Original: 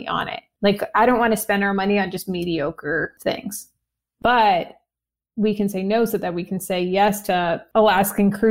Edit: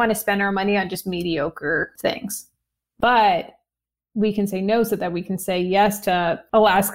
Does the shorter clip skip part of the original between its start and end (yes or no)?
no